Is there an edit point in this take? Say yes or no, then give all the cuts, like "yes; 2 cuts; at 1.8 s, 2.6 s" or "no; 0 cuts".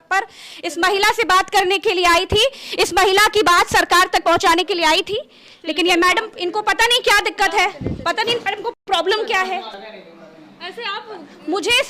no; 0 cuts